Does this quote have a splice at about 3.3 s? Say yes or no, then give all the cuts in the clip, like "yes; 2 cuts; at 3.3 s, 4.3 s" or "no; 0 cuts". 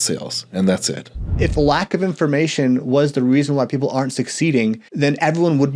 no; 2 cuts; at 1.4 s, 4.9 s